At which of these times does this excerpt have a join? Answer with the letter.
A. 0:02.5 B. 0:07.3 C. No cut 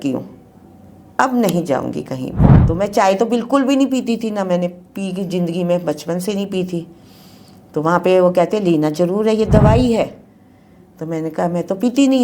A